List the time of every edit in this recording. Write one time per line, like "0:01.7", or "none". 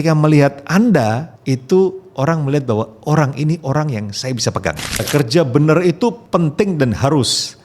0:01.3
0:05.1
0:06.2

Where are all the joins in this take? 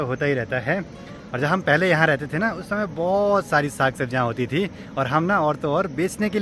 none

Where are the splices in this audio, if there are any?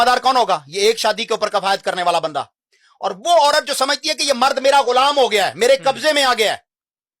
none

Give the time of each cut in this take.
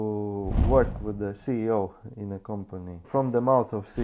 0:03.1

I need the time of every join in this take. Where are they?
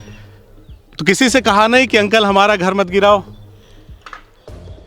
0:00.9
0:03.4

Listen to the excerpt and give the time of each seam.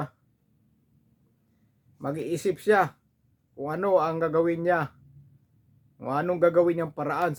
none

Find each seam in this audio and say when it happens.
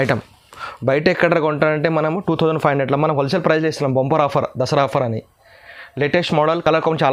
none

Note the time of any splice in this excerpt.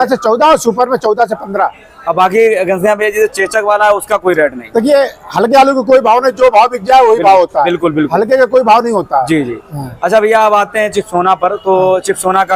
none

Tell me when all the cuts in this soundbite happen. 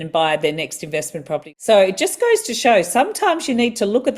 0:01.5

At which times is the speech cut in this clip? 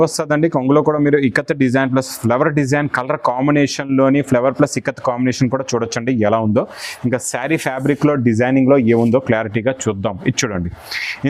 none

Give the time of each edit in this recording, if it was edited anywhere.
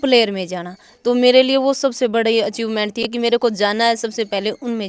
none

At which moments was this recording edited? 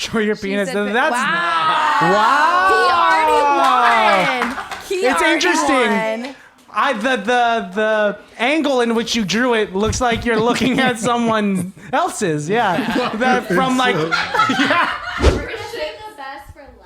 0:15.3

